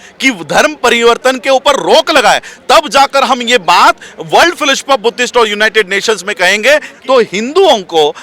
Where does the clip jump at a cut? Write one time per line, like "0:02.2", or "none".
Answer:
0:06.9